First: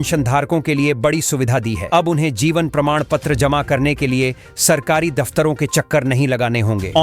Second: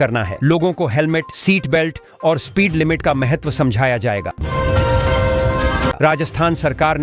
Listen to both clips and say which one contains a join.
second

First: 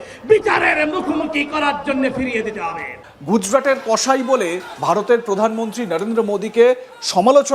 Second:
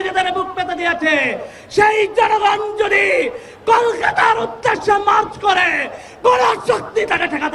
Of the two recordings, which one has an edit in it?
first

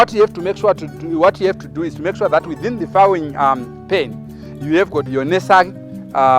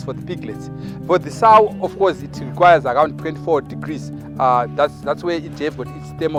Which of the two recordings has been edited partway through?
first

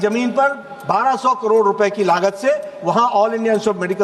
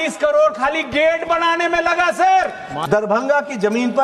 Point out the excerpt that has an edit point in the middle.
second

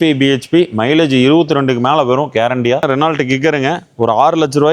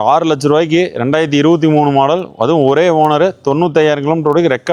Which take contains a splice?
first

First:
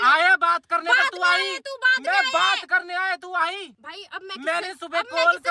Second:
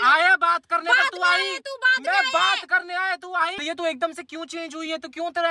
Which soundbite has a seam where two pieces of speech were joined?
second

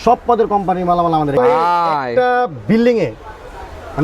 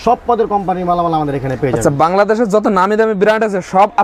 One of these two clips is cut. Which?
first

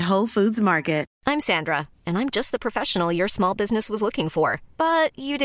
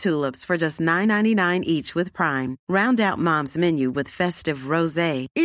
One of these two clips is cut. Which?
first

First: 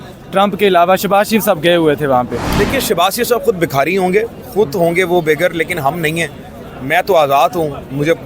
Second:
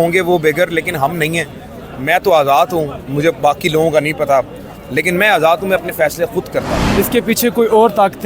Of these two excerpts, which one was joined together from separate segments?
second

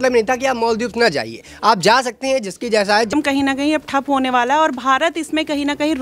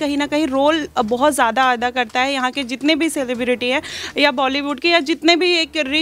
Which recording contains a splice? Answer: first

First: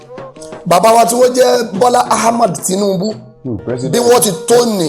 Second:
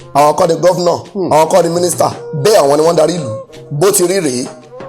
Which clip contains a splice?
second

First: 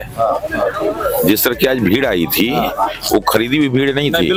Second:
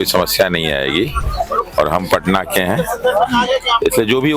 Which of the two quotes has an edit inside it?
second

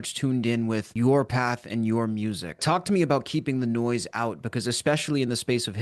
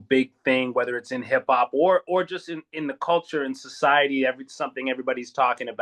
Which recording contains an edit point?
first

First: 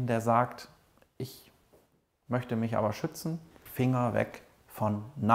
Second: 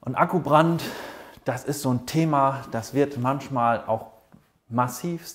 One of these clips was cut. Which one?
first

